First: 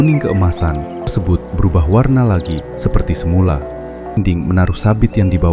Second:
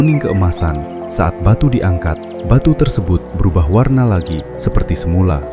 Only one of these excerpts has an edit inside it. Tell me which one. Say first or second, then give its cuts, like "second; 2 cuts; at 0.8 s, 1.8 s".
first; 2 cuts; at 1.1 s, 4.2 s